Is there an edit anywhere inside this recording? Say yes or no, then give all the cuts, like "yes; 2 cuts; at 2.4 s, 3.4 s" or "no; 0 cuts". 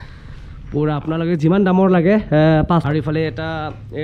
yes; 1 cut; at 2.9 s